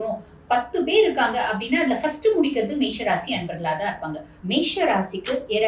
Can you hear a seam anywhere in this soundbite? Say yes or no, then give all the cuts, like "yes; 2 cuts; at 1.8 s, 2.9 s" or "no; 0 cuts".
yes; 1 cut; at 4.3 s